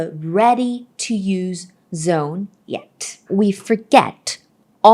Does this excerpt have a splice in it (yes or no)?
yes